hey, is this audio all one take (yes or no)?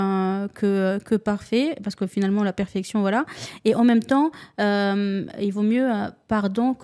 yes